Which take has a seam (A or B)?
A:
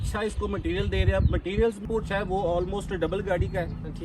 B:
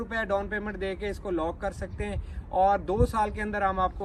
A